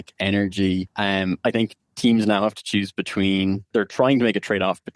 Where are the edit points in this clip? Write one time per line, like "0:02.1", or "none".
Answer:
0:00.9
0:03.7